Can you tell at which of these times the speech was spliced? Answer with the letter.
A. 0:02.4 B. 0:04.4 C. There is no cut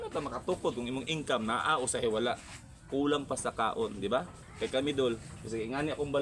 B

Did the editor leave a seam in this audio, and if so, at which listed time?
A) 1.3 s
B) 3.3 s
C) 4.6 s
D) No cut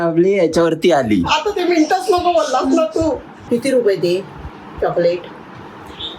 B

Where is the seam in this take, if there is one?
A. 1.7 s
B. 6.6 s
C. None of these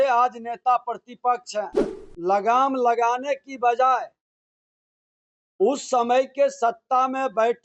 A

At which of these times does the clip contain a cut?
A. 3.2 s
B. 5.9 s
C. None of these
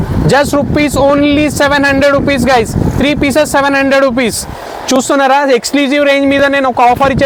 C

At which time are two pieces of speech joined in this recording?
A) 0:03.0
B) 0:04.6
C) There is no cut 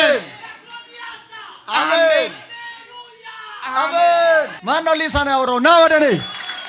B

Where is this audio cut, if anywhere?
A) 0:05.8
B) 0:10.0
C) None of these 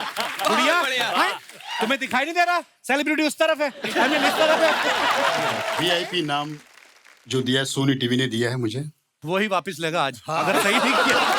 A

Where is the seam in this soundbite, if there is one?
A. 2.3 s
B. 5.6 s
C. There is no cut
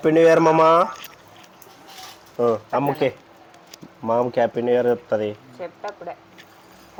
C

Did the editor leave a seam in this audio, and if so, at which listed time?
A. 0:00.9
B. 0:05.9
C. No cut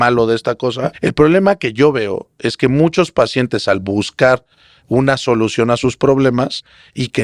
A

